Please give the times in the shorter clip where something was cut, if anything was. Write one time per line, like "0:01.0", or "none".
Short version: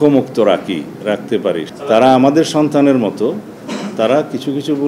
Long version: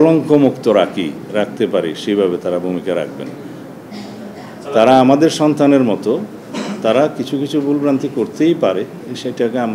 0:01.7